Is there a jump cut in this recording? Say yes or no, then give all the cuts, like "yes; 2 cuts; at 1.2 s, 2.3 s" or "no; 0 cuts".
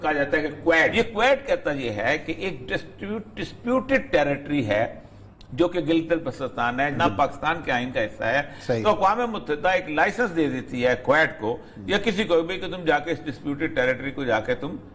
yes; 2 cuts; at 0.9 s, 6.9 s